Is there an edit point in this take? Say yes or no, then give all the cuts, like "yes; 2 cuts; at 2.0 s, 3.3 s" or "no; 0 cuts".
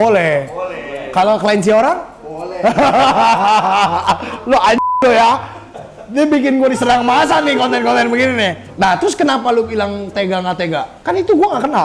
no; 0 cuts